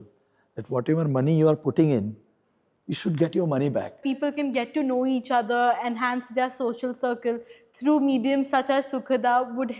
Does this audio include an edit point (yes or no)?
yes